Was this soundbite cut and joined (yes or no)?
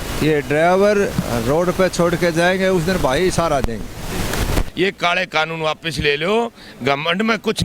yes